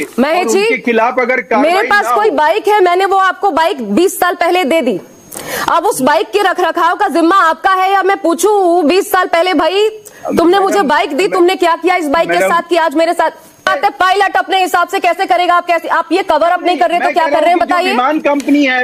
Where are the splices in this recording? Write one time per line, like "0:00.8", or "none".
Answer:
0:13.7